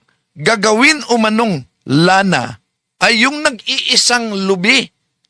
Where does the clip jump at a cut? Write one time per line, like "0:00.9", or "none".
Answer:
none